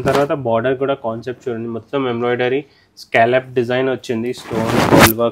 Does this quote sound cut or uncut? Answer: uncut